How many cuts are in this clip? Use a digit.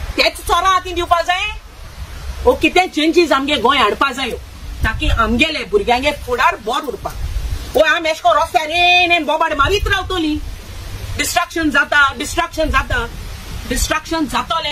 0